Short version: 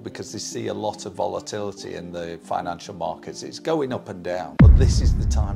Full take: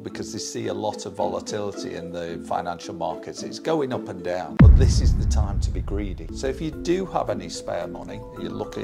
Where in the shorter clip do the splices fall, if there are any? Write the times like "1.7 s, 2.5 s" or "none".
none